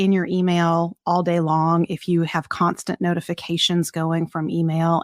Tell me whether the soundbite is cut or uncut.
uncut